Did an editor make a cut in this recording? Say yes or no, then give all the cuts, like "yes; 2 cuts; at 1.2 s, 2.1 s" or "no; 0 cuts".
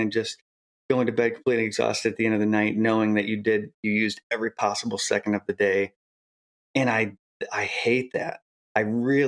yes; 1 cut; at 8.4 s